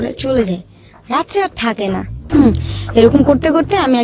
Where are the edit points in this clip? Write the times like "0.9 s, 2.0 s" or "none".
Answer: 2.2 s